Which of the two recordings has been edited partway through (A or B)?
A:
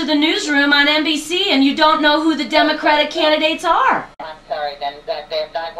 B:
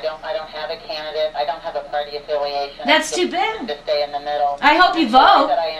A